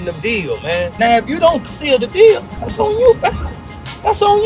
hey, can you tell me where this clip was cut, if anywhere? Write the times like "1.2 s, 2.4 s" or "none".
0.9 s, 2.6 s